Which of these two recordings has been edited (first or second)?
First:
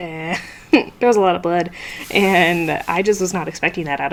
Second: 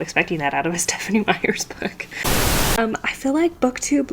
second